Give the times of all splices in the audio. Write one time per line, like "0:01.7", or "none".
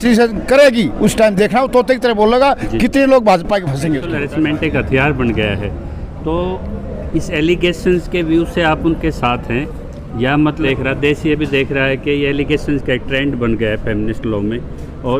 0:03.9
0:10.6